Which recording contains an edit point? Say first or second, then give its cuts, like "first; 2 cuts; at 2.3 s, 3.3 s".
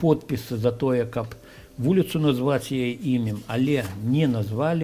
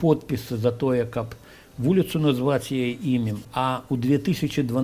second; 1 cut; at 3.4 s